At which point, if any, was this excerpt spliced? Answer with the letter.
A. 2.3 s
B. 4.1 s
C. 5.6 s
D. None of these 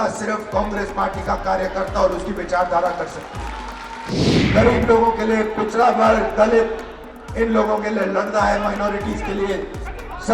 B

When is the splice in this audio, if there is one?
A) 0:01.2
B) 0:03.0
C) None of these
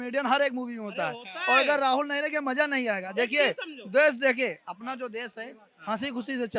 C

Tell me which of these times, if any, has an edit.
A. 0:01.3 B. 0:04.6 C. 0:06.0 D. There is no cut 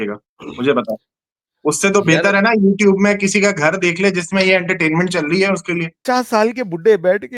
C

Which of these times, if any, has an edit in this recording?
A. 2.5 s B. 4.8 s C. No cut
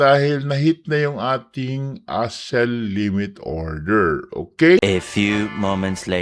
B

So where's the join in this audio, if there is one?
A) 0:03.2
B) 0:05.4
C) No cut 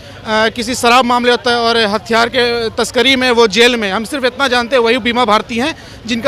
C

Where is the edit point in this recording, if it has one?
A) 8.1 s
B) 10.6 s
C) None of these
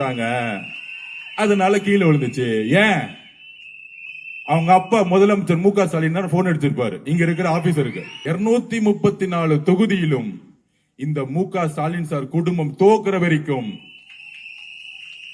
A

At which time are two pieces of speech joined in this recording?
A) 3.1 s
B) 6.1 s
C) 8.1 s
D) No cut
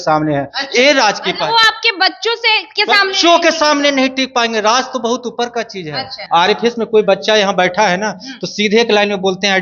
B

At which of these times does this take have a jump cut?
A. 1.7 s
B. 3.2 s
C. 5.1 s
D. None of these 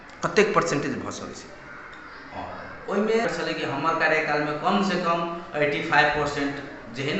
B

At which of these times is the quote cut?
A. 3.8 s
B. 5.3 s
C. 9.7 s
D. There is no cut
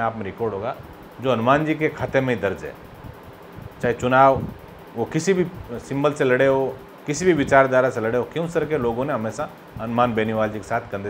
D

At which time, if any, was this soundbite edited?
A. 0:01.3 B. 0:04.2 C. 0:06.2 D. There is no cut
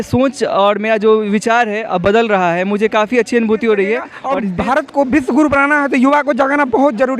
B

